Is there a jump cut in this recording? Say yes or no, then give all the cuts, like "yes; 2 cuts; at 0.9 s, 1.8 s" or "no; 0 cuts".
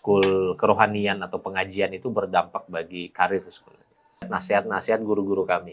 yes; 1 cut; at 4.3 s